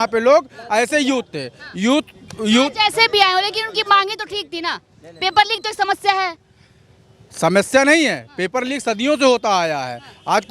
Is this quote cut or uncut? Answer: uncut